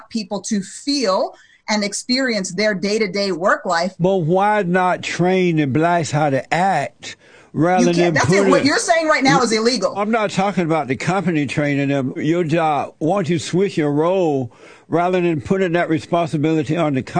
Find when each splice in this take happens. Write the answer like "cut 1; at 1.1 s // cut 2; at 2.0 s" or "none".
cut 1; at 3.9 s // cut 2; at 10.0 s // cut 3; at 12.2 s